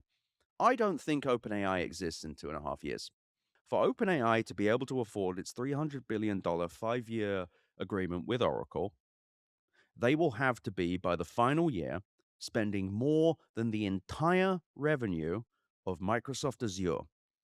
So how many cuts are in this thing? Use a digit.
1